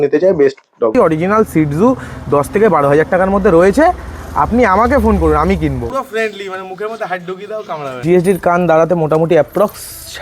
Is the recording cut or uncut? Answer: cut